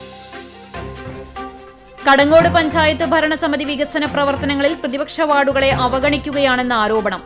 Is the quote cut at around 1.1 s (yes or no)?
yes